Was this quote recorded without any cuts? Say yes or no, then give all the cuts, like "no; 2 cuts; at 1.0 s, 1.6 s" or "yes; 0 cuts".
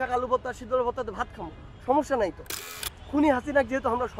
no; 1 cut; at 2.7 s